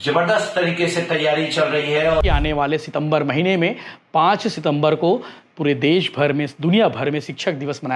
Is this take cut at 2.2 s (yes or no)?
yes